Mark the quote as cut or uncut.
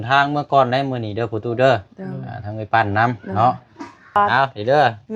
cut